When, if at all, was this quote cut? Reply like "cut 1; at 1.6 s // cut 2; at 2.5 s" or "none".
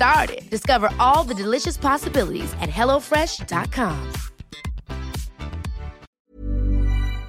cut 1; at 6.1 s